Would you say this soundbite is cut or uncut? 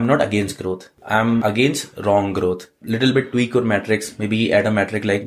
cut